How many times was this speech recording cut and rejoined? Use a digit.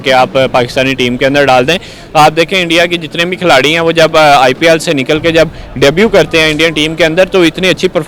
0